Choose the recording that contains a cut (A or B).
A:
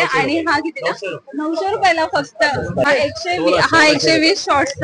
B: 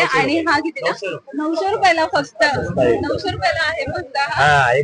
A